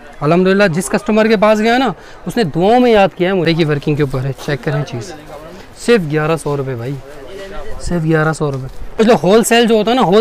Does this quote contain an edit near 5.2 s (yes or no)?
no